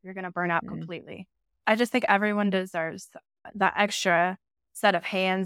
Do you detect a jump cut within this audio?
yes; 2 cuts; at 1.6 s, 3.5 s

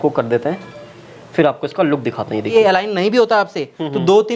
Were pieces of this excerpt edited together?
yes; 1 cut; at 2.5 s

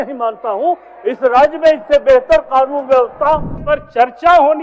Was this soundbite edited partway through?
yes; 1 cut; at 3.6 s

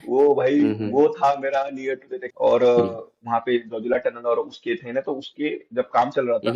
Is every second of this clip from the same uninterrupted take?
no; 1 cut; at 2.2 s

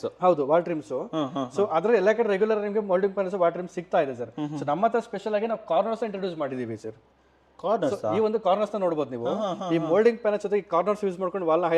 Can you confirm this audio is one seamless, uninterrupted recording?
yes; 0 cuts

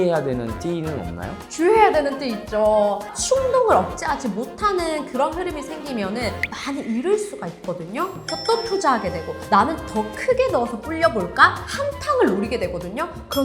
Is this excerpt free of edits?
no; 2 cuts; at 3.1 s, 8.3 s

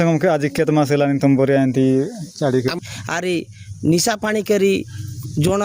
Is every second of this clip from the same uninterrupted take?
no; 1 cut; at 2.8 s

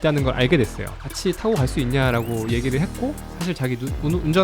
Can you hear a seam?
yes; 1 cut; at 1.0 s

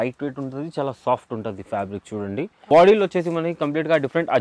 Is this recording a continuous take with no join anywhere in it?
no; 1 cut; at 2.6 s

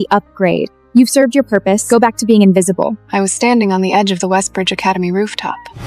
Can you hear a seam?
yes; 1 cut; at 3.0 s

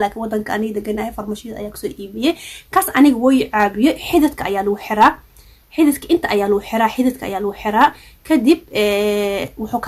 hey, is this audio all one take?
yes; 0 cuts

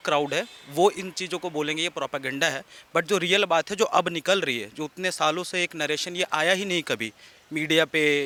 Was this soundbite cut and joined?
no; 0 cuts

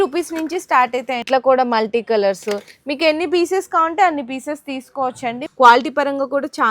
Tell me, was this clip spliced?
yes; 2 cuts; at 1.2 s, 5.4 s

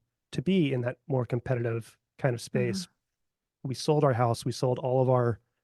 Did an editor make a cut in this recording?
yes; 1 cut; at 3.5 s

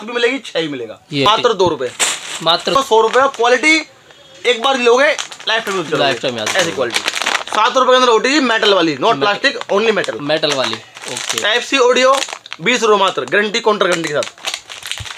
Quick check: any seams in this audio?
yes; 2 cuts; at 1.3 s, 2.7 s

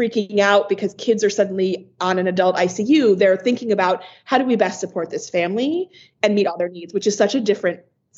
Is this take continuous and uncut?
yes; 0 cuts

